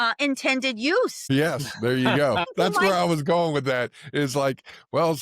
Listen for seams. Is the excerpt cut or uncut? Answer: cut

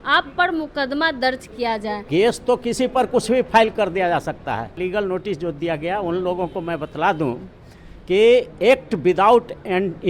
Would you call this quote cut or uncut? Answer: cut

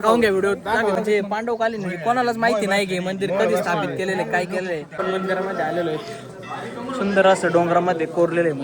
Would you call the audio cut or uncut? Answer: cut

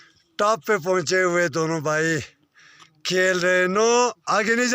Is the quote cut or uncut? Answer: uncut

